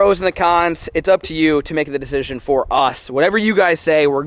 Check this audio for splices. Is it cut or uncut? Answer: uncut